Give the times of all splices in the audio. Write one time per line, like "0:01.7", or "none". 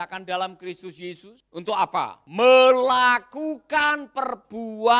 0:01.3
0:02.2